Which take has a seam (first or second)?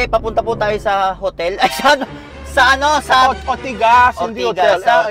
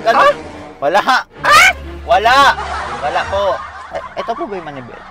second